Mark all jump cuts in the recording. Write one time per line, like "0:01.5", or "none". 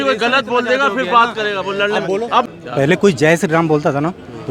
0:02.5